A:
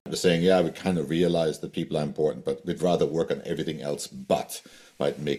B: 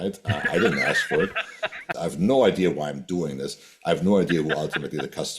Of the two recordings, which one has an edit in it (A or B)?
B